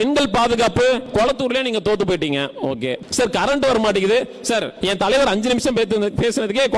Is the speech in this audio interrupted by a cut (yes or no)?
yes